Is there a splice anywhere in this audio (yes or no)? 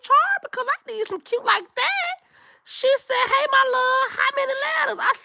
no